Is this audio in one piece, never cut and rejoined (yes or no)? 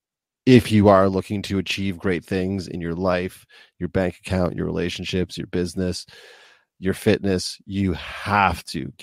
yes